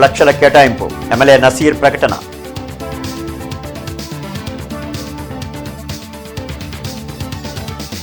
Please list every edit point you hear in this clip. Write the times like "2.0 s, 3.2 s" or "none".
none